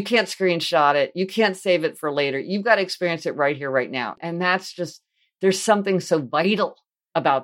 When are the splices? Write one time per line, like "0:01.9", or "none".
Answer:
0:04.2